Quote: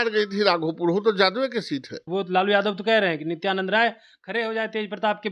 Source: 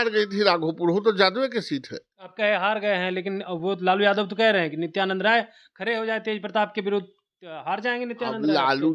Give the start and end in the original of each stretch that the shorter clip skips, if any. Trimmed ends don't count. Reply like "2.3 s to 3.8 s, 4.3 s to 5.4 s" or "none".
2.0 s to 3.5 s